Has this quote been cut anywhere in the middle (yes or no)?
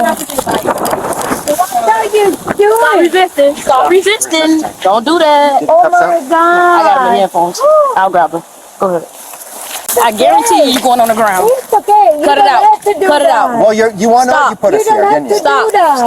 yes